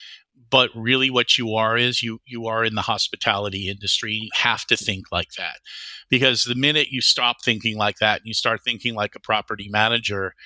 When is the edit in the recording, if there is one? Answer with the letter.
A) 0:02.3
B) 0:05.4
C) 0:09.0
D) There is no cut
D